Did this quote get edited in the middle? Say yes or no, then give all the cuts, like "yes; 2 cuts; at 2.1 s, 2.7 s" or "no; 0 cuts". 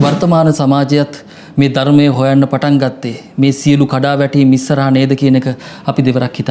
no; 0 cuts